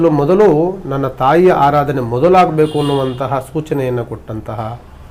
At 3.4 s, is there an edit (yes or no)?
no